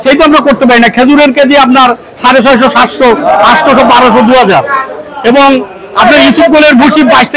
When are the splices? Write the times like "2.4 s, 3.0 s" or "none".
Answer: none